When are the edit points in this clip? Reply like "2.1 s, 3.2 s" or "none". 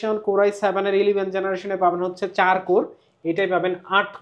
none